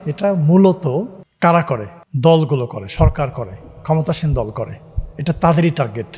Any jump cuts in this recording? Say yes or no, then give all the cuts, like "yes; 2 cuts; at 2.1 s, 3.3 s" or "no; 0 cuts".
yes; 2 cuts; at 1.2 s, 2.0 s